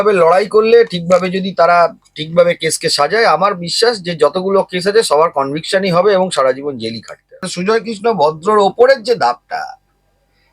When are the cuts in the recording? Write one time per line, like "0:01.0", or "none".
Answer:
0:07.5